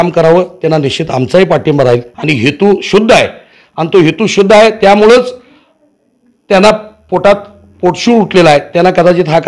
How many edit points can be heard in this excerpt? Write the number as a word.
one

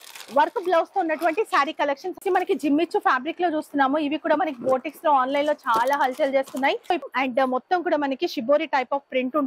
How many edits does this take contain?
two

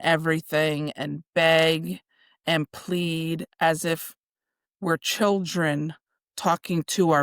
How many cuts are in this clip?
zero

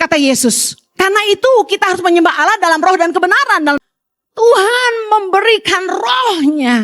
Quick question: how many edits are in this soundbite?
one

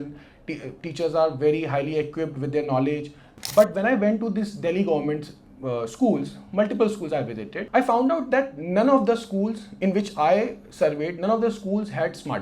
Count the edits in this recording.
two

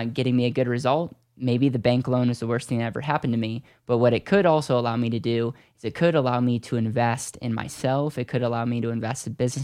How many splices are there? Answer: zero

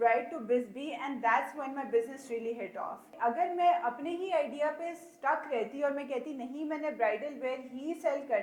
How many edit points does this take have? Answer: one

